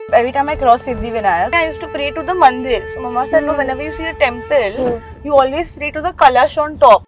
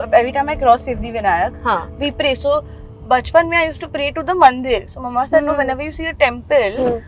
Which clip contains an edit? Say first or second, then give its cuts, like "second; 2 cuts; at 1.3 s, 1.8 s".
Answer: first; 1 cut; at 1.5 s